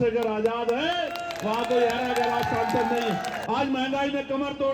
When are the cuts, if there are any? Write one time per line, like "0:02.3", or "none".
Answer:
0:03.4